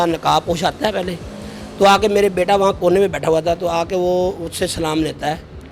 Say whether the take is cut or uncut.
uncut